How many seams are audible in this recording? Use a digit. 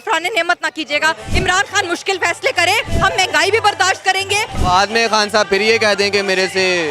2